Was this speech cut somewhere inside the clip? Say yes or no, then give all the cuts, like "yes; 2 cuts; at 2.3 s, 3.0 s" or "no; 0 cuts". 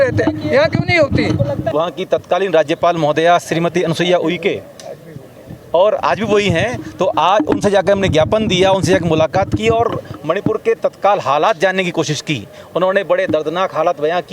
yes; 1 cut; at 1.7 s